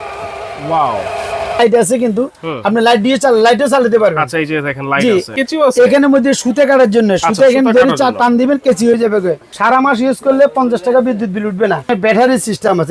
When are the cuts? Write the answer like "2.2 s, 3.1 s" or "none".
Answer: 1.6 s, 5.3 s, 9.5 s, 11.9 s